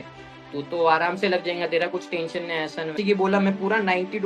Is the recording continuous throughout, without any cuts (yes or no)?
no